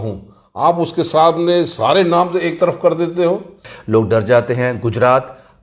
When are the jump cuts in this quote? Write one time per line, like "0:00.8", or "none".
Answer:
0:03.7

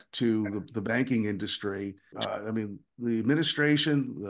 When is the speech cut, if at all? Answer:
0:02.2

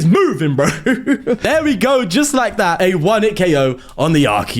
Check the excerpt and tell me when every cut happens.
0:01.4
0:02.8

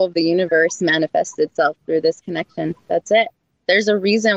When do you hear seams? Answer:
none

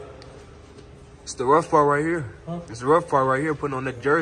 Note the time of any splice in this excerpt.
none

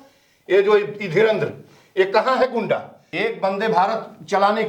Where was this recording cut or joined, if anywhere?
0:03.0

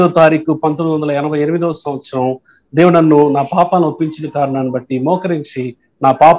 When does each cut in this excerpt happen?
none

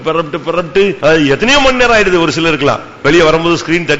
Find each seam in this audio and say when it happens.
0:01.0

